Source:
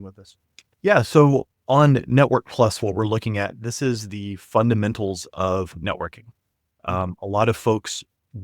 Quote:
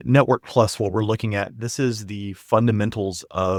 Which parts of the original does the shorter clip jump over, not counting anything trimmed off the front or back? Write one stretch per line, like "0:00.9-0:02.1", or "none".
none